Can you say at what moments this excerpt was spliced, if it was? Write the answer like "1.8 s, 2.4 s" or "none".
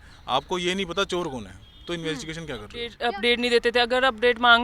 2.9 s